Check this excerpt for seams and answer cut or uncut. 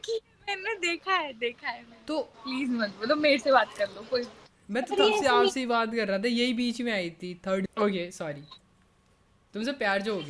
cut